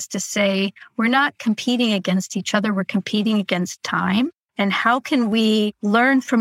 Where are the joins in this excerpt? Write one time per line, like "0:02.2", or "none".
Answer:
0:04.4